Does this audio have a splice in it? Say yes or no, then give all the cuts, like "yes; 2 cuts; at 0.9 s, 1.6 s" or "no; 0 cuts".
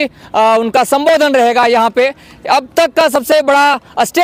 no; 0 cuts